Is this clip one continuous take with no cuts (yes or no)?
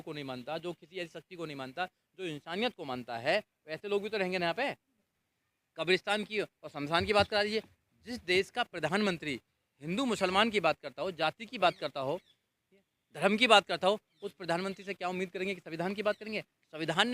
no